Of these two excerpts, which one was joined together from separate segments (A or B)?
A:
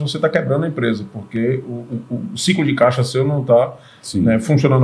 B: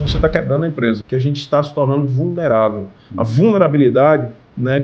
B